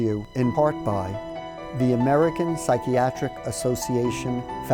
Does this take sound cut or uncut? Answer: cut